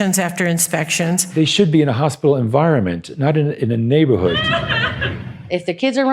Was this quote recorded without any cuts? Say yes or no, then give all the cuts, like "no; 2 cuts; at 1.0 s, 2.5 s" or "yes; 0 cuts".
no; 2 cuts; at 1.3 s, 4.4 s